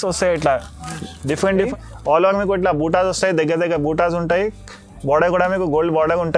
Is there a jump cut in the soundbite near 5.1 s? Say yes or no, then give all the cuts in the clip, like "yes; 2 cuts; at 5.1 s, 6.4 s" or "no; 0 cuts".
no; 1 cut; at 1.5 s